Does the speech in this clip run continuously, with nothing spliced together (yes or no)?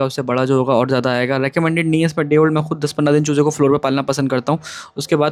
yes